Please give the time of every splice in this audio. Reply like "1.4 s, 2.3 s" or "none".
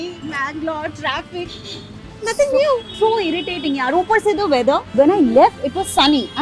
none